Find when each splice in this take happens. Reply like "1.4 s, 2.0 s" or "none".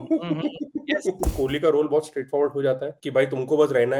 1.3 s

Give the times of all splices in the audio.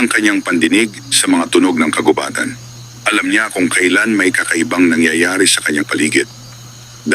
5.8 s

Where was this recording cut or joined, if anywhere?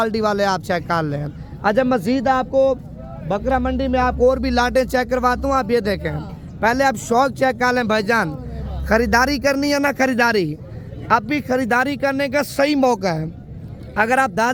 none

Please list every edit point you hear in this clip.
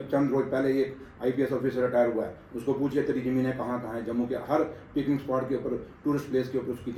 none

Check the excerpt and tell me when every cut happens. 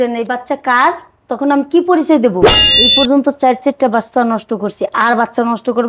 2.5 s

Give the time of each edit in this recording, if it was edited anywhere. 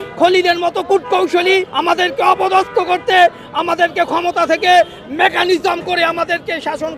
1.7 s

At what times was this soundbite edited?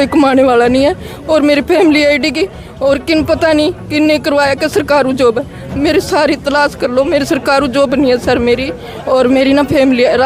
none

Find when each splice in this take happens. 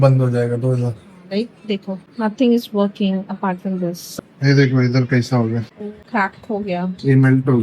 4.0 s

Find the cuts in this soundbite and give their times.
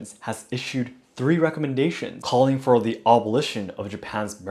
2.1 s

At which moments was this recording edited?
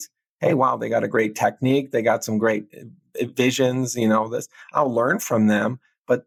none

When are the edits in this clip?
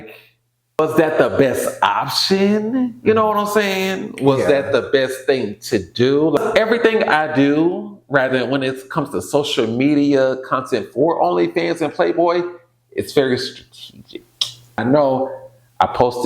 0.8 s, 6.4 s, 14.8 s

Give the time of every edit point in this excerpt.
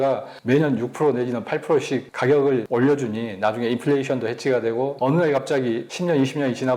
2.1 s, 2.7 s, 4.9 s, 5.9 s

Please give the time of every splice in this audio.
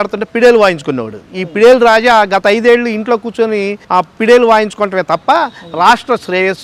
none

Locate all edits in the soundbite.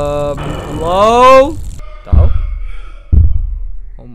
1.6 s

